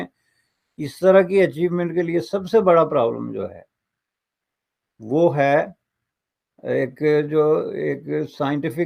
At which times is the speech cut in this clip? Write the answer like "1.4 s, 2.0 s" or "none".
none